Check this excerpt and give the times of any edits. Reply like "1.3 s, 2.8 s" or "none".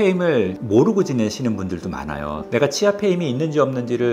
2.4 s

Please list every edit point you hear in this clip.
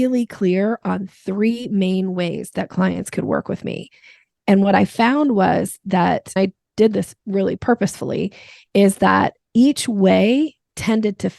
6.4 s, 7.6 s

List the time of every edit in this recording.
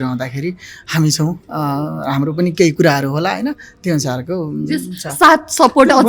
none

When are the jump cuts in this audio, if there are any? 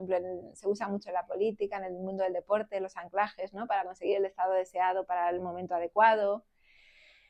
none

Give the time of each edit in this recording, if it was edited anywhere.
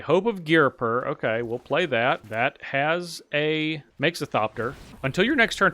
2.3 s, 3.9 s, 4.9 s

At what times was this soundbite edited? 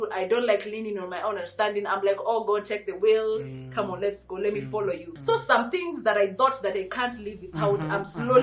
5.1 s

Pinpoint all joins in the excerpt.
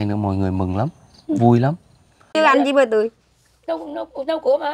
2.3 s

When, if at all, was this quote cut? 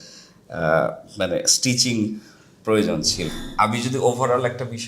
3.3 s

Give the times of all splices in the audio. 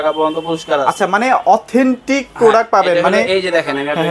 none

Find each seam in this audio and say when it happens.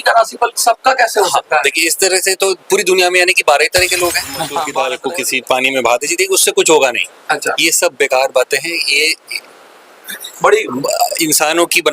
4.8 s

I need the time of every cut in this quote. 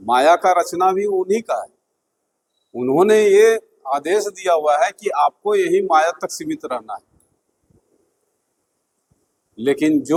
none

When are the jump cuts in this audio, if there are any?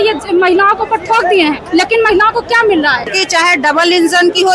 1.6 s, 3.2 s

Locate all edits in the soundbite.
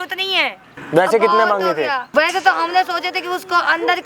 0.8 s, 2.1 s

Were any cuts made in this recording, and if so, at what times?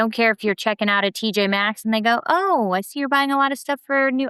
none

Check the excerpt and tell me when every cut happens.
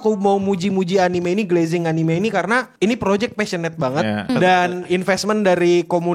2.7 s, 4.3 s

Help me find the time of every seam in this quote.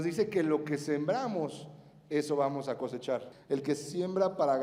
3.3 s

